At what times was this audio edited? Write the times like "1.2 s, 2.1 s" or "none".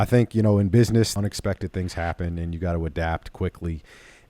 1.1 s